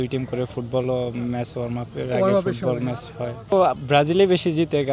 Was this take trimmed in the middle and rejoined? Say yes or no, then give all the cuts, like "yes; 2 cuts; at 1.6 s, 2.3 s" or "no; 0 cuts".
yes; 1 cut; at 3.5 s